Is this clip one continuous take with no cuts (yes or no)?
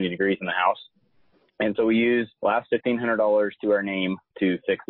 no